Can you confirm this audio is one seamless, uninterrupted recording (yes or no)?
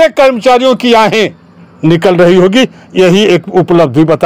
yes